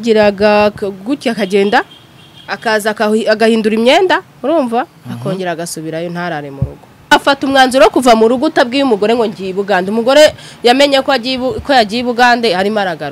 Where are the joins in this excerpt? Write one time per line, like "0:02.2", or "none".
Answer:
0:07.1